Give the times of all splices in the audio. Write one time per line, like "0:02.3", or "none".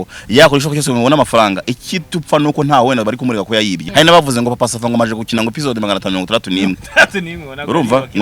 0:03.8